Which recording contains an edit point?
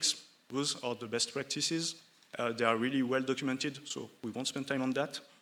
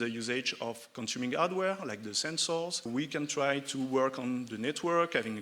second; 1 cut; at 2.9 s

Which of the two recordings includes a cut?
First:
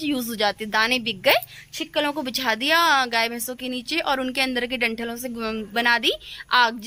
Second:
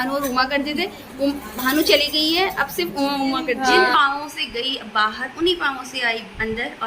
second; 1 cut; at 3.9 s

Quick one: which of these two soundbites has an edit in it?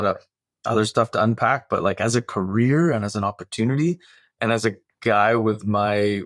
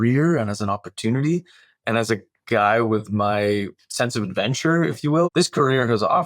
second; 1 cut; at 5.3 s

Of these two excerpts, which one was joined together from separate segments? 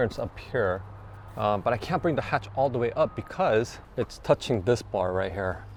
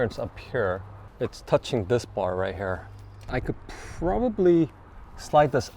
second; 2 cuts; at 1.0 s, 3.3 s

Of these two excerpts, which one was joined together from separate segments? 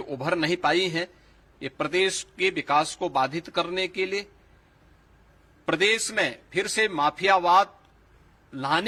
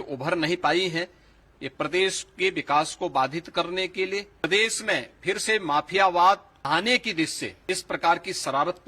second; 3 cuts; at 4.4 s, 6.5 s, 7.5 s

